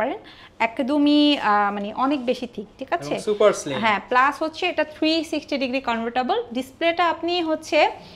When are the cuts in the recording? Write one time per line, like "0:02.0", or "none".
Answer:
none